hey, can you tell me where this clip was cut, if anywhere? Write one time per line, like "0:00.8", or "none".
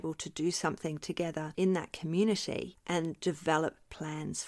0:01.5
0:02.7